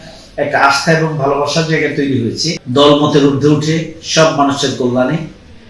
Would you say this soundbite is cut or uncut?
cut